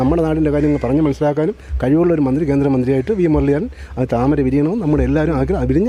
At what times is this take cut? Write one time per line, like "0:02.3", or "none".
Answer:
none